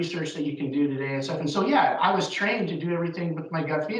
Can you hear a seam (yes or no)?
no